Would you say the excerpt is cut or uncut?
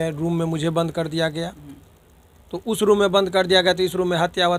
uncut